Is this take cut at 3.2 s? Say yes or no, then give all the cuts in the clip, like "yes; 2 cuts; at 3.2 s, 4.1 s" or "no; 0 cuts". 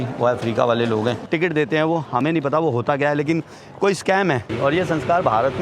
no; 2 cuts; at 1.2 s, 4.5 s